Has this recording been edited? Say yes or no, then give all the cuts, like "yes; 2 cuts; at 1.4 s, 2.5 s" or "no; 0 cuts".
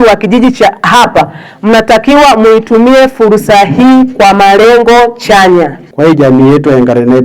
yes; 1 cut; at 5.8 s